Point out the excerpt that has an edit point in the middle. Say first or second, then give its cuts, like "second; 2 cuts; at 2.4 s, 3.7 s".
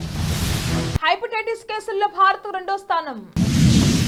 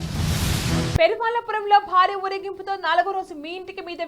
second; 1 cut; at 1.0 s